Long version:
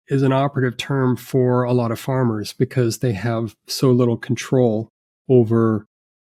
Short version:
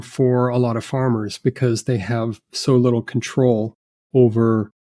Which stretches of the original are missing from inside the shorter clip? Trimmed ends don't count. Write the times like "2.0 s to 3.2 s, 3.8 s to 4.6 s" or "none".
none